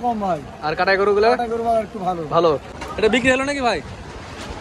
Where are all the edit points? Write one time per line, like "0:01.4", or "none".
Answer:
0:02.7